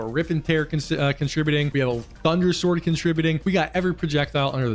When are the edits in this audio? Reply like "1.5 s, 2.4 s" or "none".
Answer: 1.7 s, 3.4 s